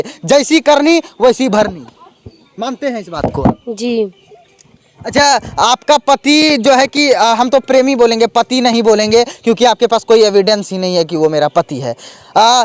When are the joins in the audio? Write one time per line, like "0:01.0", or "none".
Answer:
none

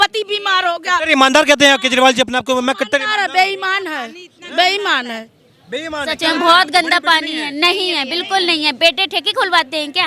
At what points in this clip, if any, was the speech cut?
none

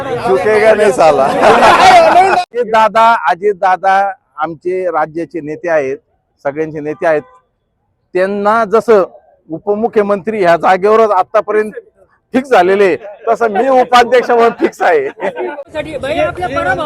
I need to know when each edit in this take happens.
0:02.6
0:15.7

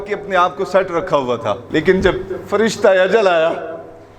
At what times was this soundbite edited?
0:01.6

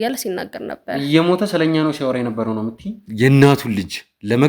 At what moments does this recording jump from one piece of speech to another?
0:03.0

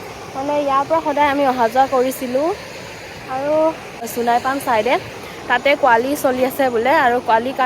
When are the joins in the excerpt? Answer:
0:04.0

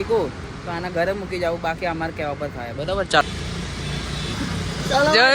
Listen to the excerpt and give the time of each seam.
0:03.2

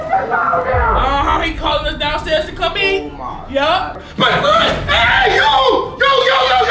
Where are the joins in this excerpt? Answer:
0:01.0
0:03.9

